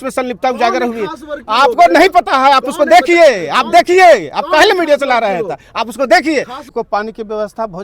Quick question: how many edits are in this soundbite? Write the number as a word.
one